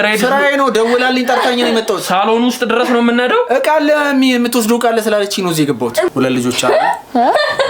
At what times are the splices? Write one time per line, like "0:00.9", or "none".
0:06.1